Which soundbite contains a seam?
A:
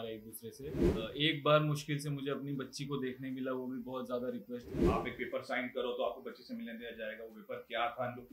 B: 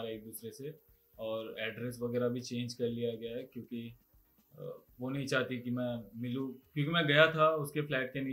A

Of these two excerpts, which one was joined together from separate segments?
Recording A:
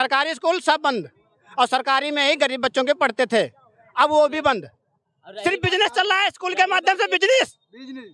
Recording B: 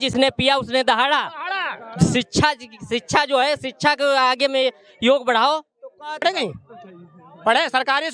B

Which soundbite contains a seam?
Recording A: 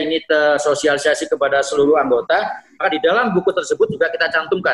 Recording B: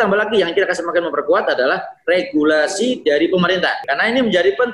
B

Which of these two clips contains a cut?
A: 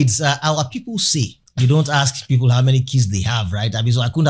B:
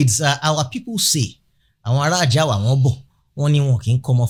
A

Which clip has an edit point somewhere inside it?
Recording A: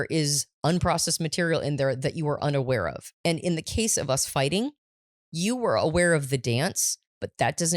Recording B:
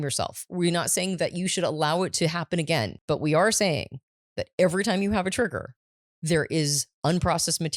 B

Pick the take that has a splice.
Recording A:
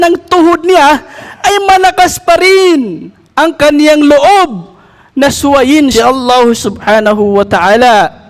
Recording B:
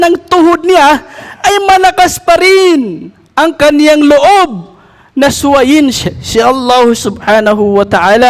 A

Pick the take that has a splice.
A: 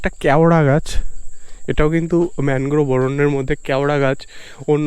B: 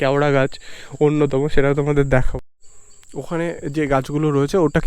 B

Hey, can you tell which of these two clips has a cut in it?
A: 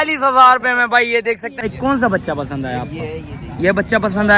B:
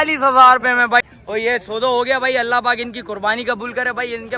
A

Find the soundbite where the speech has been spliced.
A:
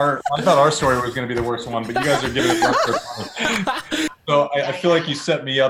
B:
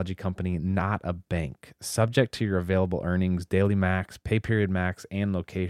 A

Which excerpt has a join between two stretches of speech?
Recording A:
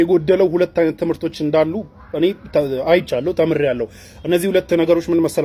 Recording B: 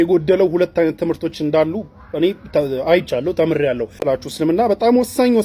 B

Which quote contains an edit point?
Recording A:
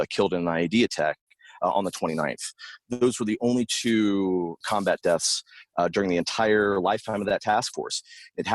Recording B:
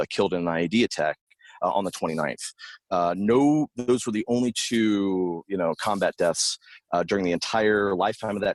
A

